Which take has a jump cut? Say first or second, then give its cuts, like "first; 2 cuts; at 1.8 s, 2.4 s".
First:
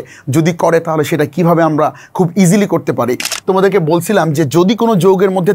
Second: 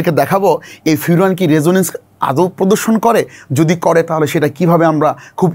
first; 1 cut; at 3.3 s